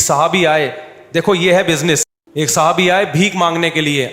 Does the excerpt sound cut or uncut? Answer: cut